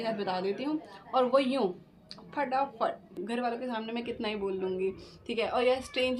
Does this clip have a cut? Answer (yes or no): yes